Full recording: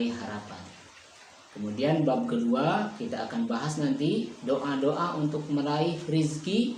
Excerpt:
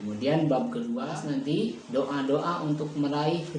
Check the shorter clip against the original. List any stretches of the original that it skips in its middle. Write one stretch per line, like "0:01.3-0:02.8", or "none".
0:02.6-0:03.6